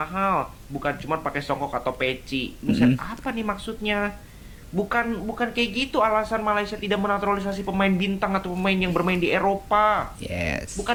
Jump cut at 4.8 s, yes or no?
no